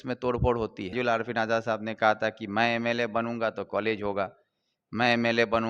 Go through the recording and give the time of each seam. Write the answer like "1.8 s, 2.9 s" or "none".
0.9 s